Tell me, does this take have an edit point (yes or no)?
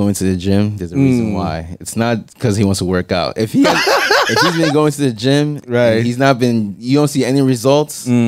no